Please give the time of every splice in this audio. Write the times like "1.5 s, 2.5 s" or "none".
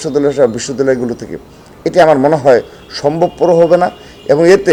none